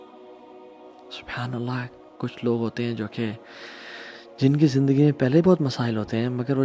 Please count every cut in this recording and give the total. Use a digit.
1